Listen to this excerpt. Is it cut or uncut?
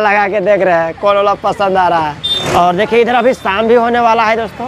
uncut